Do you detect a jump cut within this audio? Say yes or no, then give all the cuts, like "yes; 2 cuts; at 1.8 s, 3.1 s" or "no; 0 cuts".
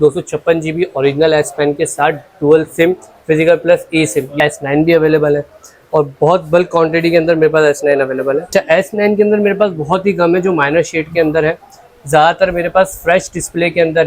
yes; 2 cuts; at 4.3 s, 8.5 s